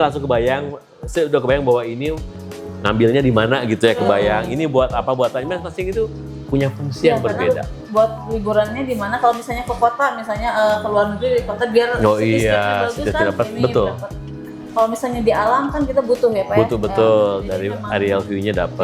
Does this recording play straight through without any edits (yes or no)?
yes